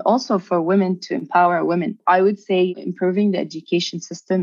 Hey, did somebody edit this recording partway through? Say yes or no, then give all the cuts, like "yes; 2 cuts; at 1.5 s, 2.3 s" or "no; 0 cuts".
yes; 2 cuts; at 2.0 s, 2.8 s